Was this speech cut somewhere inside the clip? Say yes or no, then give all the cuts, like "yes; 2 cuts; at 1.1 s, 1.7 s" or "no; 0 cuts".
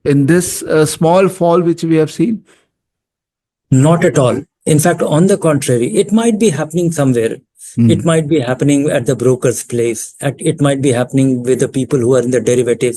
no; 0 cuts